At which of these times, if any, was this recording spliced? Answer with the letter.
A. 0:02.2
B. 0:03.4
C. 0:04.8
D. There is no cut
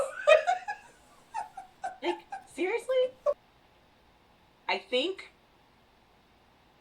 B